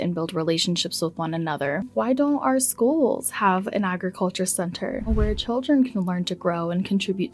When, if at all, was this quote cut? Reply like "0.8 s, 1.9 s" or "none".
1.9 s, 5.1 s